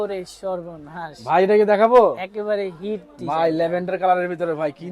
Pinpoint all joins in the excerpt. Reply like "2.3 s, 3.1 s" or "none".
none